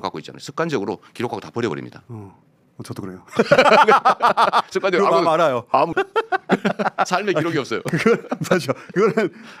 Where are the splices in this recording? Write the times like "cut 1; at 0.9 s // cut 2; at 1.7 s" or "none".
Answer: cut 1; at 5.9 s